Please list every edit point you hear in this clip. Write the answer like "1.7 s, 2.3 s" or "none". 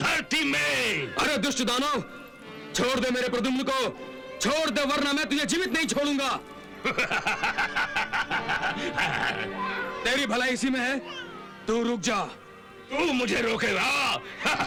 none